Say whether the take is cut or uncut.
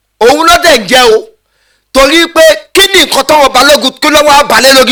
uncut